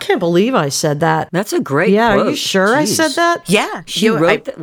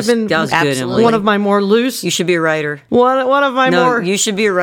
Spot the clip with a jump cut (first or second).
second